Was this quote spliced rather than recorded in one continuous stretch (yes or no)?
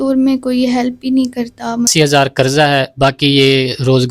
yes